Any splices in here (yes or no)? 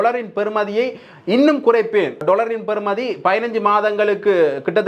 yes